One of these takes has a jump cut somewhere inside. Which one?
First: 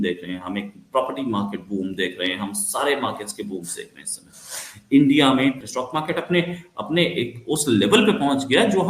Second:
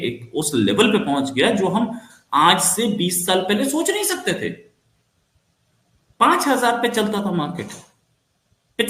first; 1 cut; at 5.7 s

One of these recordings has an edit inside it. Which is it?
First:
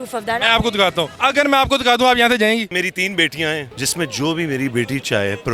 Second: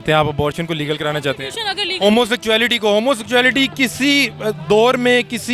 first; 3 cuts; at 1.1 s, 2.7 s, 3.8 s

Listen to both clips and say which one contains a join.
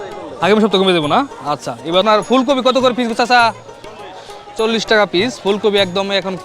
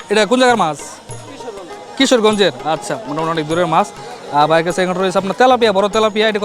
first; 1 cut; at 2.0 s

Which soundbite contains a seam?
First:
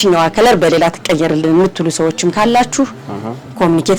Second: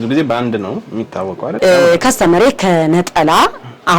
second; 1 cut; at 1.4 s

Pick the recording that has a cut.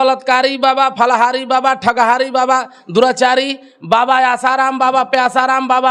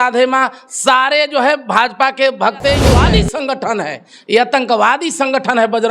second; 1 cut; at 3.0 s

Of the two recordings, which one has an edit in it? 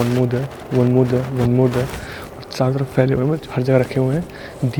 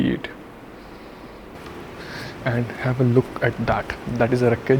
second; 1 cut; at 1.5 s

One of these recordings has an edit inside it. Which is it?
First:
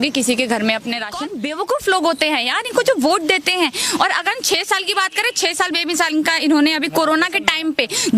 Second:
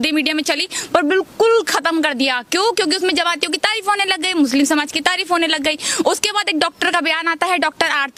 first; 1 cut; at 1.2 s

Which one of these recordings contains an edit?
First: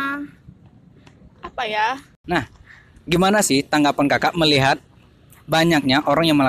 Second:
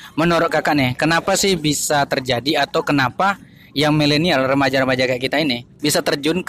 first; 1 cut; at 2.1 s

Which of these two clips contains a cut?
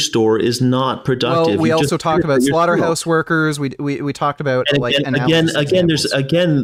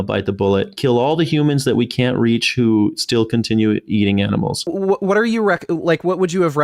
second; 1 cut; at 4.7 s

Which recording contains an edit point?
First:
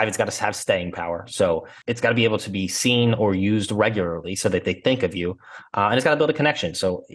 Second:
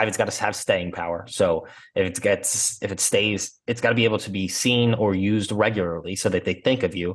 first; 1 cut; at 1.7 s

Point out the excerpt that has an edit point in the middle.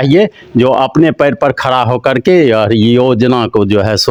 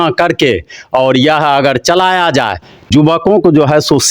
second; 1 cut; at 2.9 s

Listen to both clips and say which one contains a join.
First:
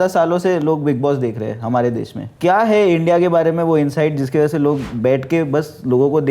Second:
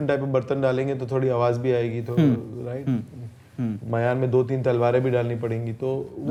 first; 1 cut; at 2.2 s

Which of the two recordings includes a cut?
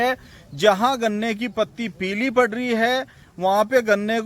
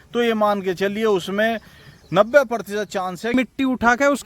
second; 1 cut; at 3.3 s

